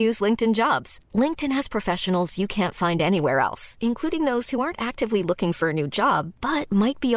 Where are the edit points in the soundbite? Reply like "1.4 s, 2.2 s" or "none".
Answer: none